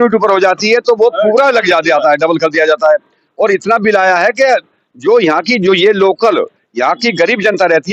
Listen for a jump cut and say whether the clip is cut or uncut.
uncut